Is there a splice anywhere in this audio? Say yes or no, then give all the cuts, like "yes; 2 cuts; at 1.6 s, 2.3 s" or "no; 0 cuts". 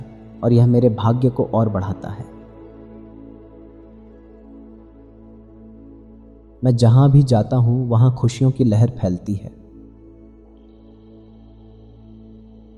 no; 0 cuts